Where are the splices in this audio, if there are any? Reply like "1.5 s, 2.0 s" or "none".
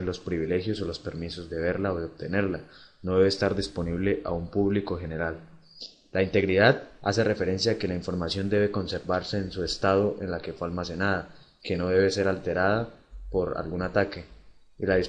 12.0 s